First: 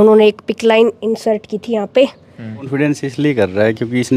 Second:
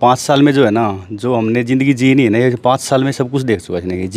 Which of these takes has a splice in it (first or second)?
first